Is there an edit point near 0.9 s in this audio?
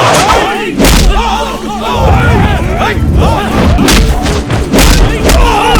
no; 1 cut; at 3.8 s

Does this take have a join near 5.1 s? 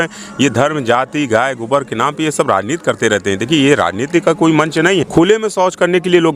yes; 1 cut; at 5.1 s

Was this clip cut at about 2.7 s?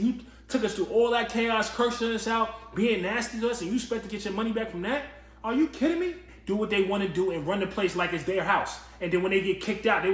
no; 1 cut; at 6.3 s

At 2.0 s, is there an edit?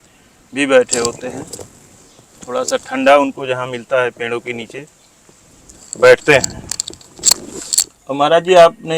no; 1 cut; at 7.7 s

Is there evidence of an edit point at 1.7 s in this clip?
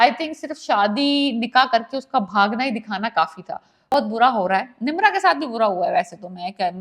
no; 1 cut; at 3.9 s

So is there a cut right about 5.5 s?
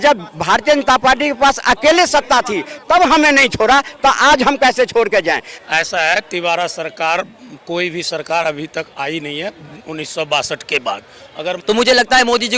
yes; 2 cuts; at 5.5 s, 11.6 s

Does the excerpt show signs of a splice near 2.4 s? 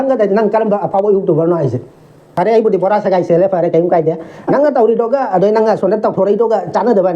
yes; 1 cut; at 2.4 s

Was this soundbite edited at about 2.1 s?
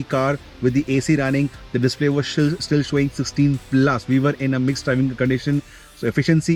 no; 0 cuts

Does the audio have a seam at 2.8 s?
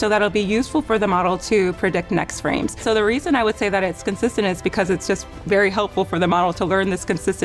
yes; 1 cut; at 2.8 s

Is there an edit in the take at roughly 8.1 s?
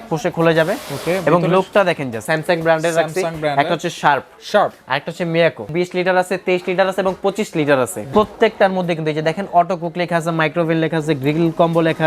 yes; 3 cuts; at 2.2 s, 5.7 s, 8.1 s

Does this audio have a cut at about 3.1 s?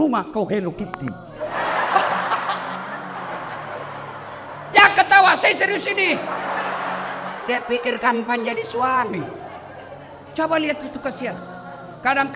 yes; 1 cut; at 3.1 s

